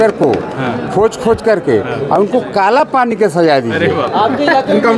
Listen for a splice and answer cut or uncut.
uncut